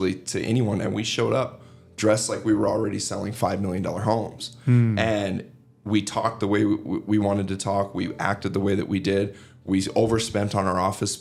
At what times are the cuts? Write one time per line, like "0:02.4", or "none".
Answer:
none